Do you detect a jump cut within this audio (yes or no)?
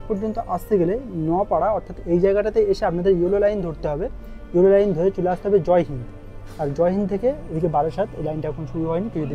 no